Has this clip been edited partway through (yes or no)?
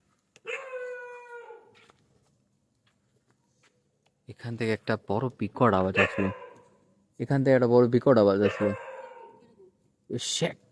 no